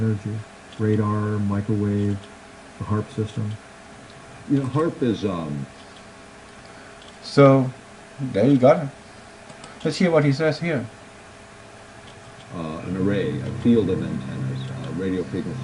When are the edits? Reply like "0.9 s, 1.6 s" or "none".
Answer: 10.0 s